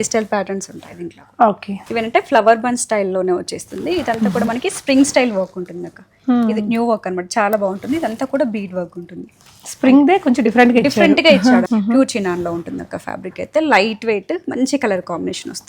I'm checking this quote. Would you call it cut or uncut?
cut